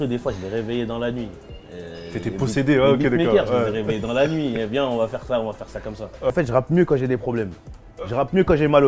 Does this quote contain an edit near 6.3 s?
yes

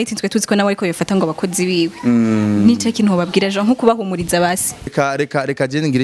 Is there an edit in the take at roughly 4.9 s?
yes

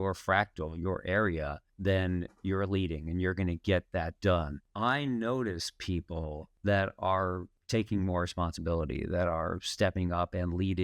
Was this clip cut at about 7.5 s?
yes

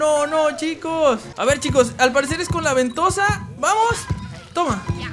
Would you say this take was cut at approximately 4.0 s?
no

